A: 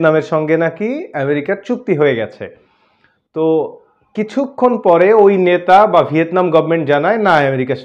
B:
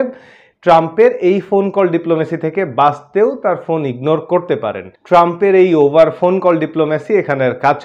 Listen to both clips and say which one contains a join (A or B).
B